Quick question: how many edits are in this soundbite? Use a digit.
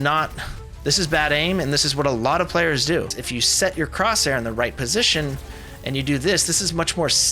1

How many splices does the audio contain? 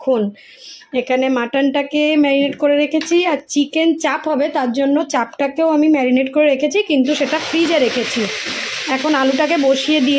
0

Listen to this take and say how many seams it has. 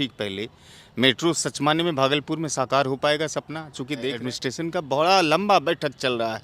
1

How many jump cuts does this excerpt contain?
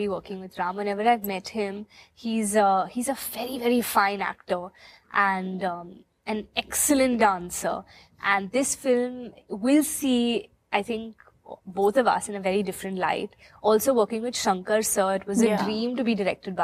0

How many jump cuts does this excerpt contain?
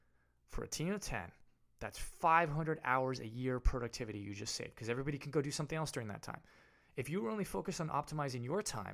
0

